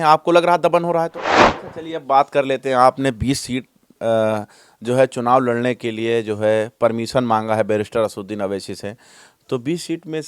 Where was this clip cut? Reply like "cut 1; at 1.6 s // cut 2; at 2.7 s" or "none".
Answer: cut 1; at 1.3 s